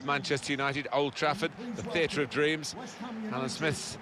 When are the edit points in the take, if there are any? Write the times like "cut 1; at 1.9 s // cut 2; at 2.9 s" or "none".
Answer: none

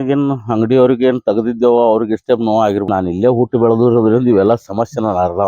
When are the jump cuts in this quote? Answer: cut 1; at 2.9 s

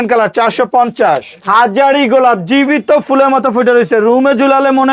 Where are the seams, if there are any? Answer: cut 1; at 1.3 s

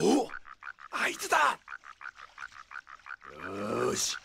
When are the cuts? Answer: cut 1; at 2.0 s // cut 2; at 3.3 s

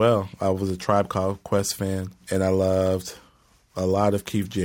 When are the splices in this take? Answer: cut 1; at 2.2 s

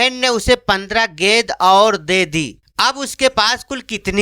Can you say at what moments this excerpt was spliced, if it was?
cut 1; at 2.6 s

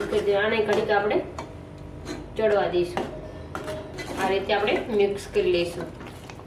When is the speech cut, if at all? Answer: cut 1; at 3.9 s

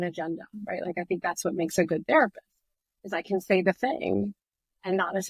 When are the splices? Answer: none

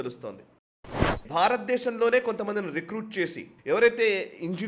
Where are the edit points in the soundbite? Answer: cut 1; at 1.1 s // cut 2; at 3.5 s

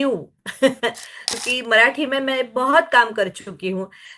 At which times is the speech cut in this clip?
cut 1; at 1.3 s

